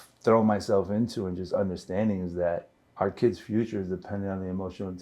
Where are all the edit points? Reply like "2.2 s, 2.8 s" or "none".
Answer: 2.8 s